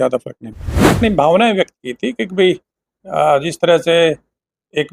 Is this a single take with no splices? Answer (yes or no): no